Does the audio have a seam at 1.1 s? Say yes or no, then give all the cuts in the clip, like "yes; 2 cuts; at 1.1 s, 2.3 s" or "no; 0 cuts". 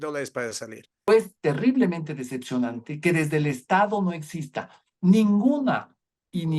yes; 1 cut; at 1.1 s